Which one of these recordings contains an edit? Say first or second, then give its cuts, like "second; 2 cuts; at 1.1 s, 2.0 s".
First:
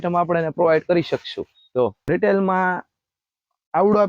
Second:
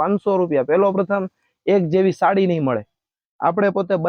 first; 1 cut; at 2.0 s